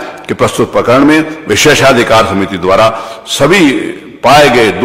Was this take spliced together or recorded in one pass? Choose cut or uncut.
uncut